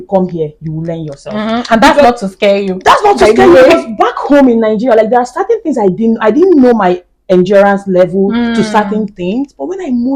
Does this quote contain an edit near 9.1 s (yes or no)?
no